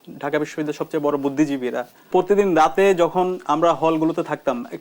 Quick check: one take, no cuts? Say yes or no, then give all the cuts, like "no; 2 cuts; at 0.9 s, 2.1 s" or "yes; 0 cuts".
no; 1 cut; at 2.1 s